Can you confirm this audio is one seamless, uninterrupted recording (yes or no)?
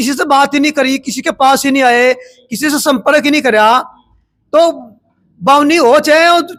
yes